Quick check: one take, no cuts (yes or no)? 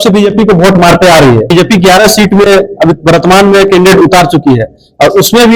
no